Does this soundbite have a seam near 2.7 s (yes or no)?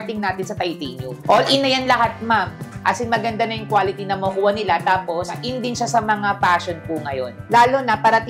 no